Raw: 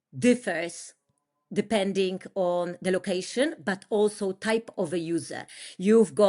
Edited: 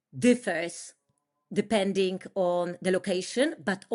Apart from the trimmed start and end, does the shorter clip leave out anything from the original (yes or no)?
no